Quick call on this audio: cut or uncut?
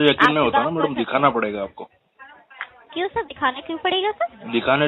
uncut